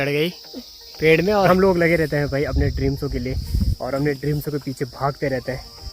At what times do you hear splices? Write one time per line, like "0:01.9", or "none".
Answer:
0:01.5